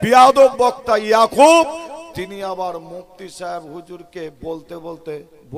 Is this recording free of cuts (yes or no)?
yes